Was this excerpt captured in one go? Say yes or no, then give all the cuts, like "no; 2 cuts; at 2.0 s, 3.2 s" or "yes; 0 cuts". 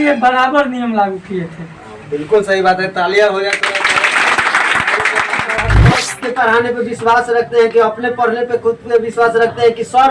no; 1 cut; at 6.1 s